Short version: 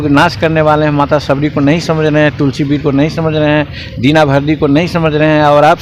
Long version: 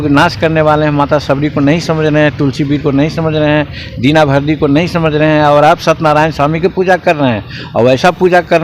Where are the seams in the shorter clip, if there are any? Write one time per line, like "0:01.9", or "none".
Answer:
none